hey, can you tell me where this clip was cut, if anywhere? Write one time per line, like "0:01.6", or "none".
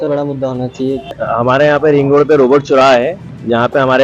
0:01.2